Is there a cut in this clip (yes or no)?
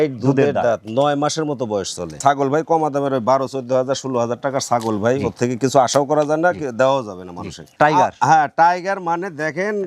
yes